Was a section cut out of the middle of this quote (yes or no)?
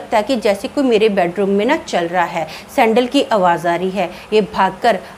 no